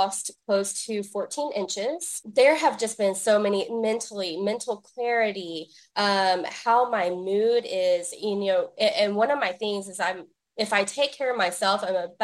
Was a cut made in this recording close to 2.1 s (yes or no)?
yes